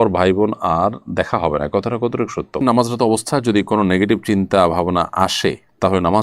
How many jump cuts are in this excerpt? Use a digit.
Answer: 1